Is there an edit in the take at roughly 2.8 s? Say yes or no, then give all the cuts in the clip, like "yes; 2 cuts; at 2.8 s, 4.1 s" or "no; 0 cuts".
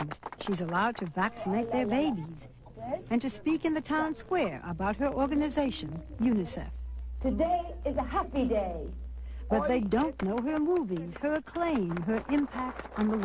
yes; 1 cut; at 2.8 s